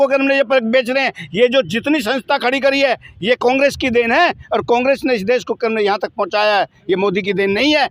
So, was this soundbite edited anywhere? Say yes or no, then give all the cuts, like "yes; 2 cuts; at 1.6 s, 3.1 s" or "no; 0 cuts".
no; 0 cuts